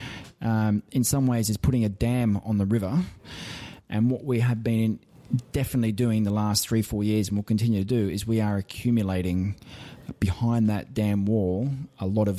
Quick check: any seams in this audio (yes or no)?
no